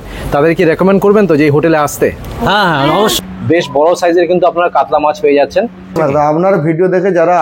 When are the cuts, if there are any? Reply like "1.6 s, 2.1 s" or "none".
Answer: 3.1 s, 6.0 s